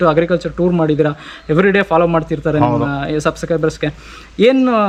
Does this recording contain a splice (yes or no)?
no